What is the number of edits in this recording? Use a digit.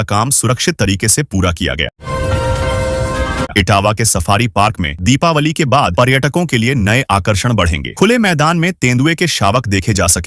3